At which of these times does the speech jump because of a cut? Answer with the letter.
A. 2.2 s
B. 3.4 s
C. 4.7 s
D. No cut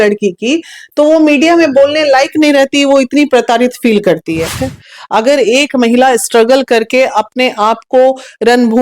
C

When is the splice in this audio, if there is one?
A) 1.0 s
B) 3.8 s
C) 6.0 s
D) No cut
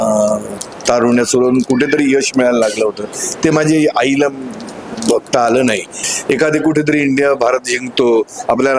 C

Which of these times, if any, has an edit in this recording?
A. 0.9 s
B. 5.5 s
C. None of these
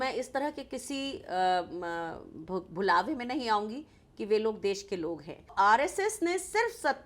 B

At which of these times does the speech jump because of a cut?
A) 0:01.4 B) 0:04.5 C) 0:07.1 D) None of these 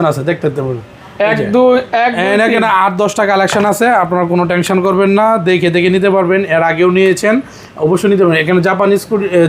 D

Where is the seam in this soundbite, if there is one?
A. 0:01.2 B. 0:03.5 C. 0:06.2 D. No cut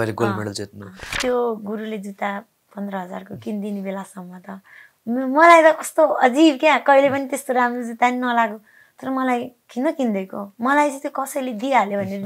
A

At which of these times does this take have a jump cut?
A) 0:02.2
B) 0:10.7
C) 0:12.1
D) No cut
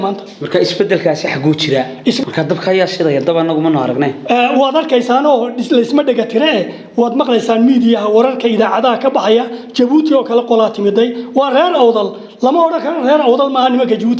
A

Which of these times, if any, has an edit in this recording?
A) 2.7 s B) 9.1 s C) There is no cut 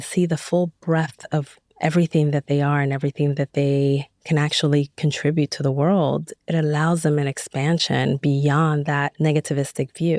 B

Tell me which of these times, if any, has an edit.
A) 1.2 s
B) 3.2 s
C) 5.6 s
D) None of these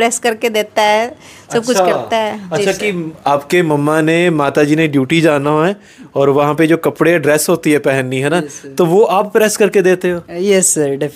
D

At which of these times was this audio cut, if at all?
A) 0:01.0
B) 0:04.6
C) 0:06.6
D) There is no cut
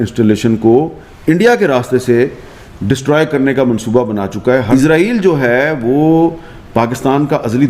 B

